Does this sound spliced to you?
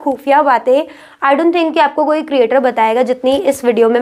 no; 0 cuts

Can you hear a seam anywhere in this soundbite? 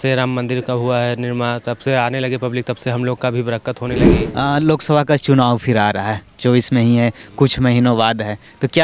yes; 1 cut; at 4.1 s

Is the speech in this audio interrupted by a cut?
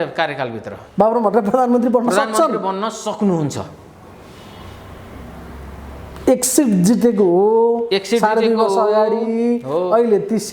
no; 0 cuts

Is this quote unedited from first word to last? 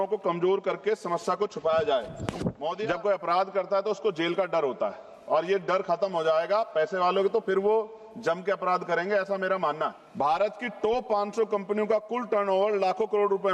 no; 2 cuts; at 2.8 s, 10.0 s

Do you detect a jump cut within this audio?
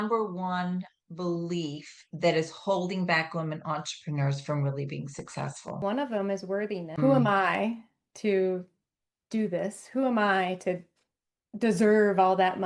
yes; 2 cuts; at 5.8 s, 6.9 s

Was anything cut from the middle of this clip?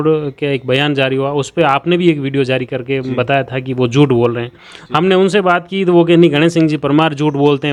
no; 0 cuts

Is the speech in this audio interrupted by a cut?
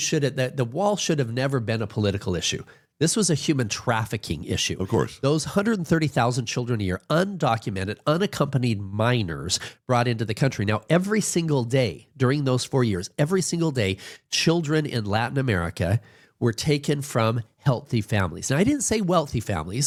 no; 0 cuts

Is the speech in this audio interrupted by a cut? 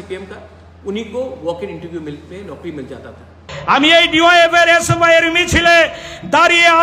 yes; 1 cut; at 3.5 s

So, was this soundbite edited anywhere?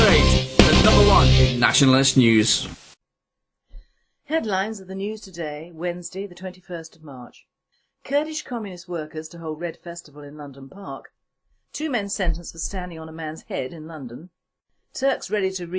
yes; 1 cut; at 7.6 s

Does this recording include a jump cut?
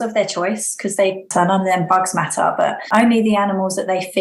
yes; 2 cuts; at 1.3 s, 2.8 s

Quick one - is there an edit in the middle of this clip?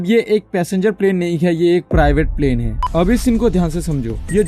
yes; 1 cut; at 2.7 s

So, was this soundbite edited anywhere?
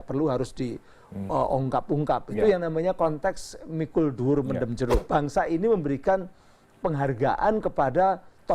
yes; 1 cut; at 5.0 s

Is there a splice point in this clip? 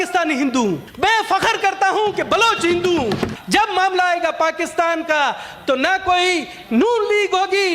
yes; 2 cuts; at 0.9 s, 3.3 s

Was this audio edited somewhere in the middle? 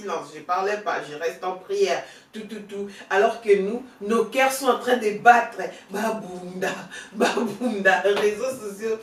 no; 0 cuts

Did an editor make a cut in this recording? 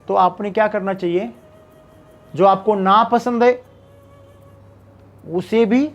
no; 0 cuts

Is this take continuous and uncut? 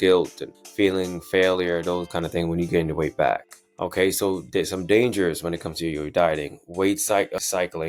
yes; 0 cuts

